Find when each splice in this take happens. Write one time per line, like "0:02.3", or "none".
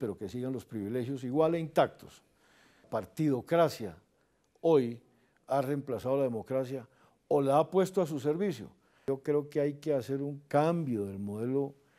0:02.8
0:08.9